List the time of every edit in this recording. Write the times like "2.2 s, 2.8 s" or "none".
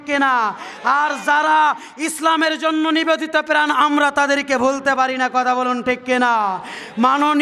none

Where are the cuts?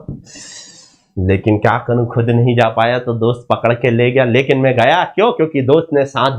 none

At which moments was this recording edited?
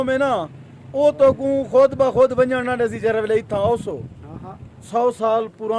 4.8 s

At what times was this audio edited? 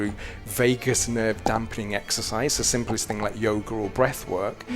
none

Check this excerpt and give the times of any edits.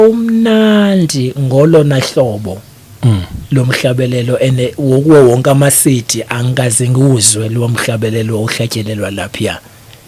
none

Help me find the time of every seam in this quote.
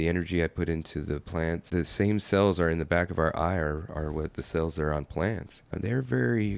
1.7 s, 5.7 s

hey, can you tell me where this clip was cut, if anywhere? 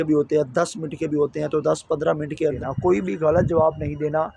2.6 s

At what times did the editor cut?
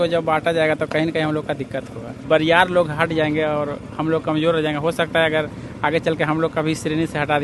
2.2 s

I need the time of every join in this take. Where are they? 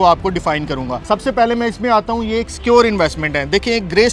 none

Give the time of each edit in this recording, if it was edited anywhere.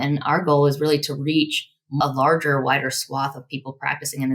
2.0 s

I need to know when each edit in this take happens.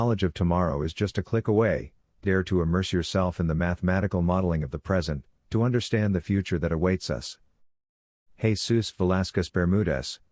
none

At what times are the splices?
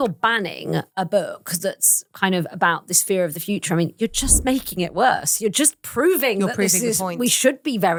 none

